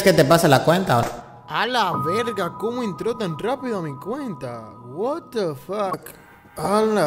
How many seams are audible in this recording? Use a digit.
1